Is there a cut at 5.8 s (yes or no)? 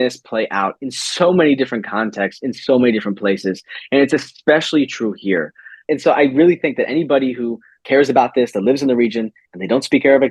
yes